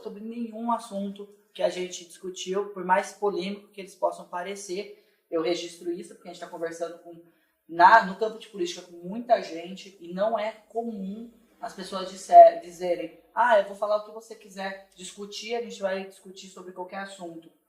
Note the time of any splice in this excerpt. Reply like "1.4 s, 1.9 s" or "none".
none